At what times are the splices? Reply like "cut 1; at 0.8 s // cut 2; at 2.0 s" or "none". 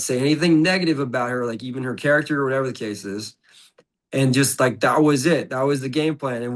none